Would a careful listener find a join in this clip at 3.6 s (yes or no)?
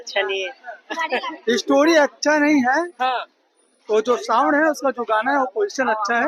no